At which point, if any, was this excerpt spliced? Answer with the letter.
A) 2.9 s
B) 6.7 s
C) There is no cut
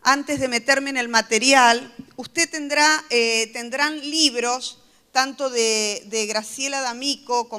B